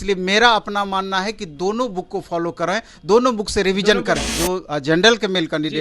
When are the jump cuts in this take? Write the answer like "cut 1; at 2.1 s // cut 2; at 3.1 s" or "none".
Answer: cut 1; at 4.3 s